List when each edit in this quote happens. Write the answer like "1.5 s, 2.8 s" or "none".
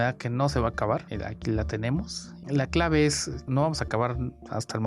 2.4 s